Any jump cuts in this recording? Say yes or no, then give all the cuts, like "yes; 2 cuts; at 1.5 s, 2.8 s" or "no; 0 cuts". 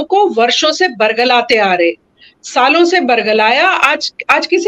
no; 0 cuts